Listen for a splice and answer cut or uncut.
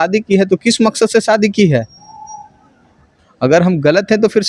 uncut